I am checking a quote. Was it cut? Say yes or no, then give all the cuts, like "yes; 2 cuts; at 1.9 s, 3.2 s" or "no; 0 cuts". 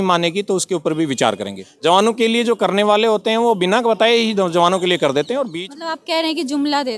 yes; 2 cuts; at 1.6 s, 5.5 s